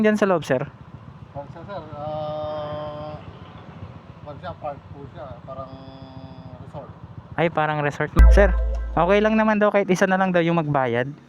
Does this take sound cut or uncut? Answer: cut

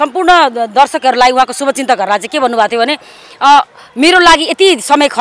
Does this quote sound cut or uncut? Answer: uncut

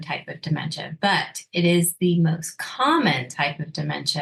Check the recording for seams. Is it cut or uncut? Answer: uncut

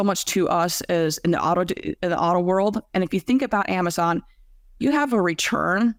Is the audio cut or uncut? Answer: uncut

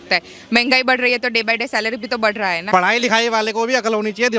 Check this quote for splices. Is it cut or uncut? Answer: cut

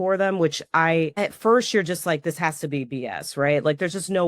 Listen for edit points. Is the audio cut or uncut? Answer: cut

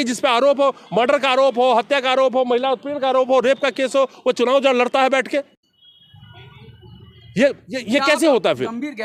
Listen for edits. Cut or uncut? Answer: uncut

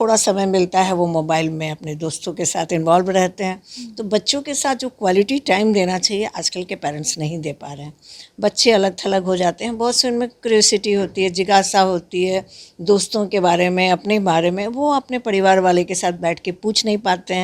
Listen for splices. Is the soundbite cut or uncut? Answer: uncut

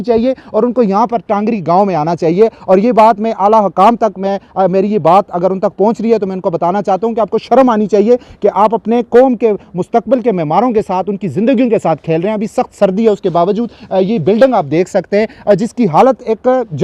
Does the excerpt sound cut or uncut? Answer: uncut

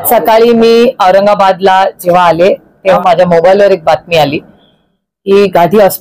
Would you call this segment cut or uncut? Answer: cut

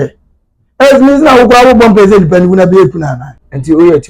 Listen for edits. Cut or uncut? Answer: uncut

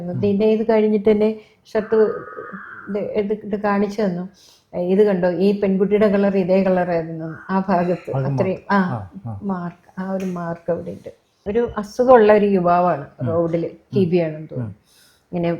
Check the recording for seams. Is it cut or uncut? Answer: cut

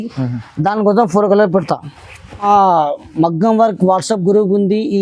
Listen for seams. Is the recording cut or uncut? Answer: cut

